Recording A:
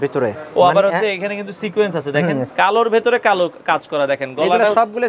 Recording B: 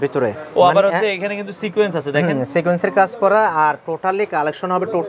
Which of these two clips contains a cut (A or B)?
A